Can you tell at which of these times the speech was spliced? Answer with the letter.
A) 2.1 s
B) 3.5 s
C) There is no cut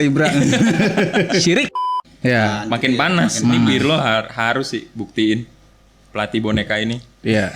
A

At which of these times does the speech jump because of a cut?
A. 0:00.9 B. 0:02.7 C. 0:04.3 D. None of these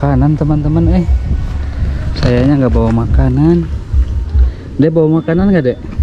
D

